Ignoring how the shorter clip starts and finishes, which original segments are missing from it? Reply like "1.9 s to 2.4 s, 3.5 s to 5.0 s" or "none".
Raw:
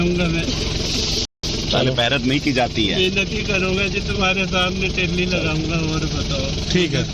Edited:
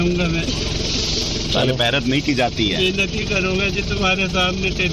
1.2 s to 1.4 s